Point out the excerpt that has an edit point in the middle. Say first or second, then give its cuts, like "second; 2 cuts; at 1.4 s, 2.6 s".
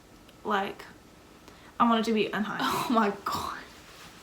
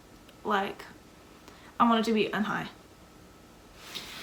first; 1 cut; at 2.6 s